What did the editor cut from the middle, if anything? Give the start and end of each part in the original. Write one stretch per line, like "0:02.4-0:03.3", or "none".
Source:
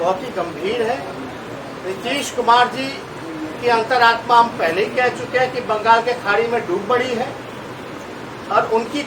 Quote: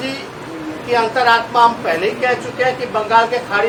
none